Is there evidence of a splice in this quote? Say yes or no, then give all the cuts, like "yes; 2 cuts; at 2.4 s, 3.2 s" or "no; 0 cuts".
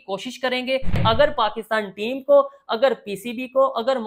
yes; 1 cut; at 1.0 s